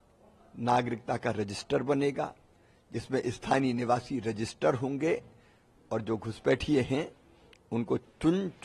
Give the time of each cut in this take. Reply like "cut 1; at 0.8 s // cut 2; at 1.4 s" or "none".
none